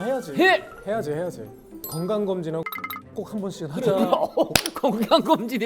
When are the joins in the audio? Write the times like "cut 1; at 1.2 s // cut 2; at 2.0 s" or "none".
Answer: cut 1; at 1.8 s